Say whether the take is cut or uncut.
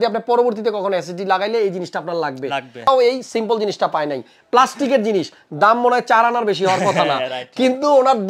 cut